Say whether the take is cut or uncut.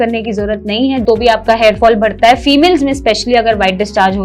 cut